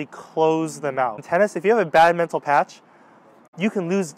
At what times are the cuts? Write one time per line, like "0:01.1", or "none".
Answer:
0:01.2